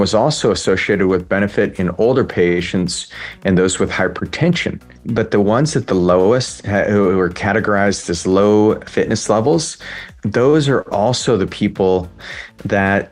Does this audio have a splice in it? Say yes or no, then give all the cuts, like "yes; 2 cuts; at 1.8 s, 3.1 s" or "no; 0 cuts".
yes; 3 cuts; at 5.0 s, 8.9 s, 10.1 s